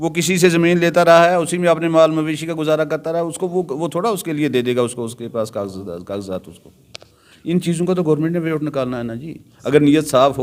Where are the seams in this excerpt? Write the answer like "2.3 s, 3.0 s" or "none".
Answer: none